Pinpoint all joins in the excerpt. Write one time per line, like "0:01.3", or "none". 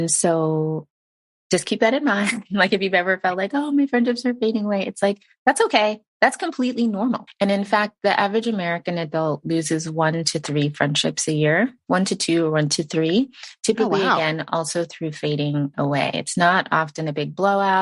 0:07.3